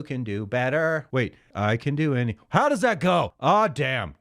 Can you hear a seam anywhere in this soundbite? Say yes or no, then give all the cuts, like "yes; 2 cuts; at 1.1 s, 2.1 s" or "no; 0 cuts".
yes; 2 cuts; at 1.2 s, 3.3 s